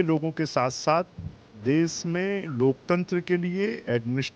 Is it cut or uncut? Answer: uncut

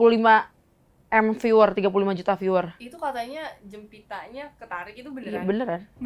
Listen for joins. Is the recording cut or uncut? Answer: uncut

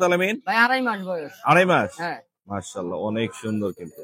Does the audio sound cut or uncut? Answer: uncut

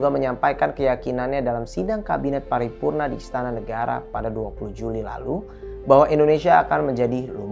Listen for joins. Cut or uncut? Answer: uncut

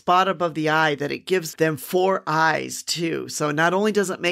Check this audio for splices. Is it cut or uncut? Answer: cut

